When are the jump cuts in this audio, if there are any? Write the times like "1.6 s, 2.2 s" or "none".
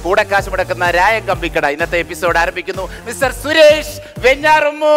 3.0 s